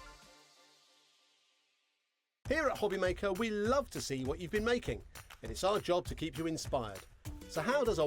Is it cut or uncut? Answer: cut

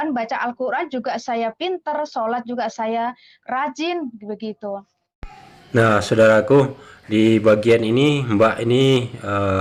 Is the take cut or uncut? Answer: uncut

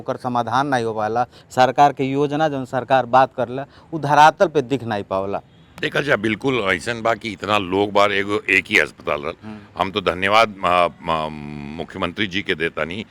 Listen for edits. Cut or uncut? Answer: uncut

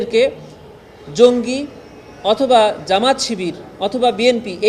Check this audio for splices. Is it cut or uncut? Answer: uncut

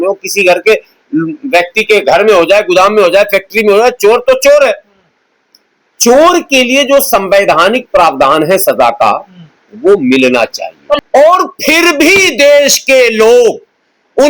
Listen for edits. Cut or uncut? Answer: cut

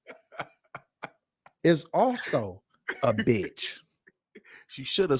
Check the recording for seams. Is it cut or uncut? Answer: uncut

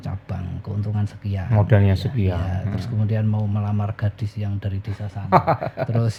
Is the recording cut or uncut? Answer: uncut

